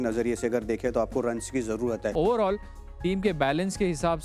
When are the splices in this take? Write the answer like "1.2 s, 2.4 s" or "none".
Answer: 2.1 s